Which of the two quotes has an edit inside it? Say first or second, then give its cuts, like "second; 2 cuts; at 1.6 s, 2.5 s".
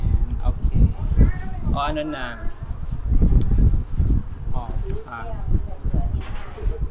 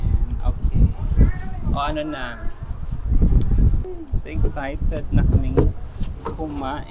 second; 1 cut; at 3.9 s